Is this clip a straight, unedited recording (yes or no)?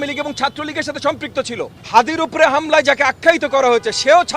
no